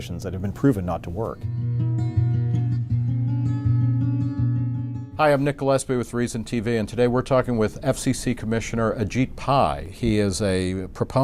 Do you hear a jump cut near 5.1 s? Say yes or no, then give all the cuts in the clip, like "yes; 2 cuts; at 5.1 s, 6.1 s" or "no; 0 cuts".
no; 1 cut; at 1.2 s